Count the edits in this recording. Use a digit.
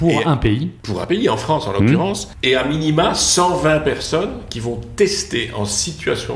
2